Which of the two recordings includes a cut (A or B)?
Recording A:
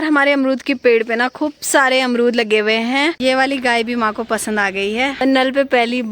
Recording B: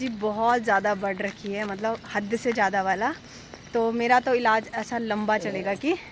A